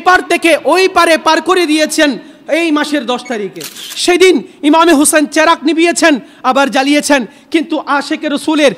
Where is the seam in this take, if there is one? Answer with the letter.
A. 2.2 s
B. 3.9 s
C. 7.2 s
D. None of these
B